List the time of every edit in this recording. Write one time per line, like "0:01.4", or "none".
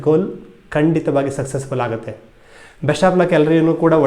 none